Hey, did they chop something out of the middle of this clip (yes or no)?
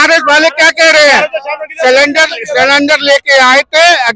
no